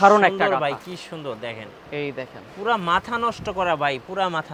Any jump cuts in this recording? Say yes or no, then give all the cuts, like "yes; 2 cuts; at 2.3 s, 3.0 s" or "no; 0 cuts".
no; 0 cuts